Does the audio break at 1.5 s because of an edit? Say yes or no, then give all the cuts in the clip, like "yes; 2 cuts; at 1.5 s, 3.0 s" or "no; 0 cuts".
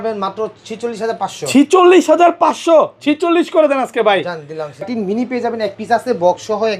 no; 1 cut; at 4.9 s